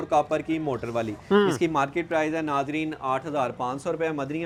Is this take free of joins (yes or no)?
yes